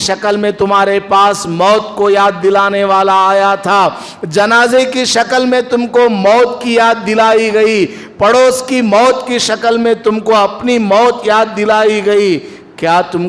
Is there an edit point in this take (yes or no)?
no